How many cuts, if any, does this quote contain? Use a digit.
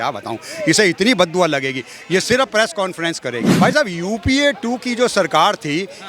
1